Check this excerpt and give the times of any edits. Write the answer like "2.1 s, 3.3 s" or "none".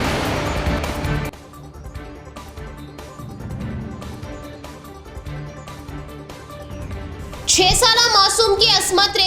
5.3 s, 7.0 s